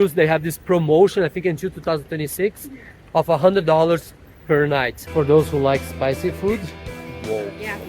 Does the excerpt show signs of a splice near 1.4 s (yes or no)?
no